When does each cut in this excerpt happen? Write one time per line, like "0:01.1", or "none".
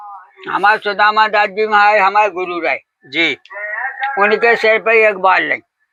none